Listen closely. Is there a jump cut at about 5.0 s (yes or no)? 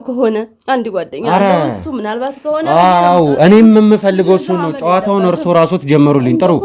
no